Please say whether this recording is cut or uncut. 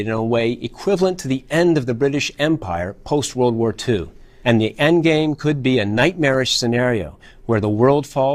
uncut